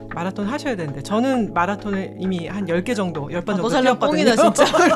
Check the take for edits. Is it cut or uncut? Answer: uncut